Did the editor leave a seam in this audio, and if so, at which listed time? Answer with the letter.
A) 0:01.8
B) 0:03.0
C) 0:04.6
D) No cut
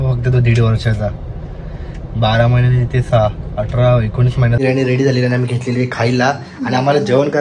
C